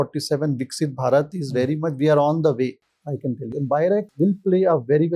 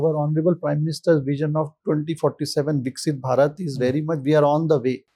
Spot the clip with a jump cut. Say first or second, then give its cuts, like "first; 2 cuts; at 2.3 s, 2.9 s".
first; 1 cut; at 4.1 s